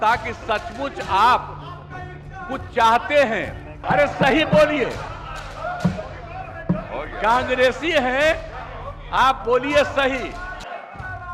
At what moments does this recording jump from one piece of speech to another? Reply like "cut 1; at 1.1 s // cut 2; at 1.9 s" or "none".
cut 1; at 3.7 s